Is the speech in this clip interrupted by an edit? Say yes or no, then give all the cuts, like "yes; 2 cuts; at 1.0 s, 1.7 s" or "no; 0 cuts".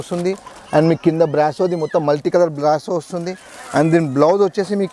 no; 0 cuts